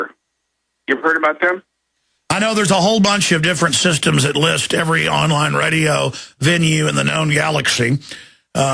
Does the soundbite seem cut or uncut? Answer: cut